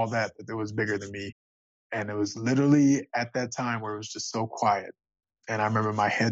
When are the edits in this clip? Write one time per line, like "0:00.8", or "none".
0:01.8